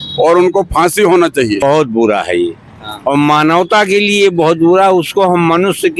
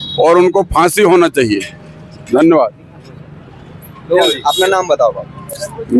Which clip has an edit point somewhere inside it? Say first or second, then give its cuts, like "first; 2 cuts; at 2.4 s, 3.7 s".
first; 1 cut; at 1.6 s